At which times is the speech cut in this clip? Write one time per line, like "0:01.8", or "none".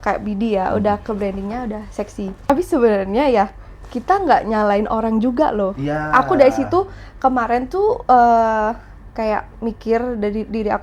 0:02.5